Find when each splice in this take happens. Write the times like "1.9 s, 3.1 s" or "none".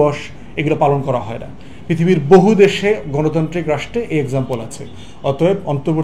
none